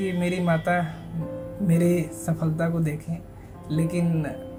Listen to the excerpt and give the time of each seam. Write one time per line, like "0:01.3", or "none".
none